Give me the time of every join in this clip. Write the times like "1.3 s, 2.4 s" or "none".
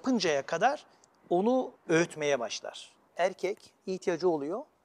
1.8 s, 3.0 s